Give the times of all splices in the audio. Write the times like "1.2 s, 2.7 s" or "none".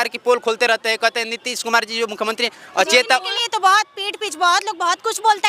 none